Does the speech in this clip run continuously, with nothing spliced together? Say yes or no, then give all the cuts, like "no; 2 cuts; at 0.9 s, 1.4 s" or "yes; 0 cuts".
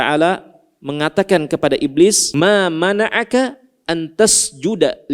no; 1 cut; at 2.2 s